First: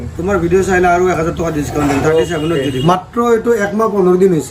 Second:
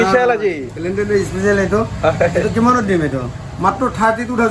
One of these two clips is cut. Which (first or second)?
first